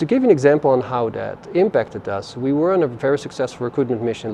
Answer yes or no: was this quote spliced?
no